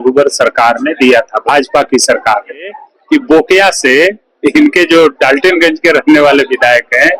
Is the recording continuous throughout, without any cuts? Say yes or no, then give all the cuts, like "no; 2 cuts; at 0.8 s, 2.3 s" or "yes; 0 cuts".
no; 1 cut; at 2.9 s